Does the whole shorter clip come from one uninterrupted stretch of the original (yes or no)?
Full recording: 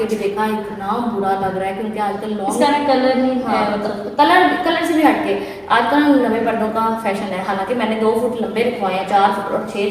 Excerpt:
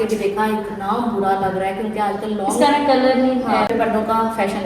no